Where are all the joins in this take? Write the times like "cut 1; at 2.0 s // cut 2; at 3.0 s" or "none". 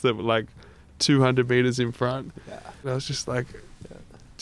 cut 1; at 2.8 s